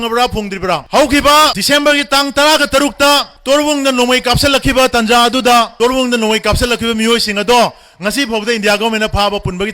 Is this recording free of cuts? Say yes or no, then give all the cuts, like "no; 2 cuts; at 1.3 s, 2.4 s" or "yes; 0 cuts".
no; 4 cuts; at 0.8 s, 1.6 s, 3.3 s, 5.7 s